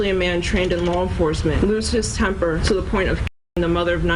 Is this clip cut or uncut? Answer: cut